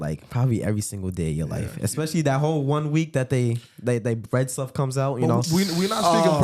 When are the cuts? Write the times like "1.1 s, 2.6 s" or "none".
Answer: none